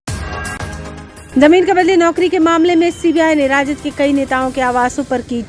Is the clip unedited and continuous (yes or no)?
yes